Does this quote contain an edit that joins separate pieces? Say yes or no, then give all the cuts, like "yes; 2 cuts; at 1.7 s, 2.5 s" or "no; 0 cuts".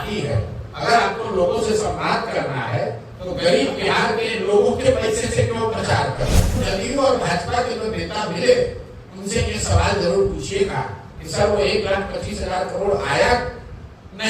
yes; 1 cut; at 6.6 s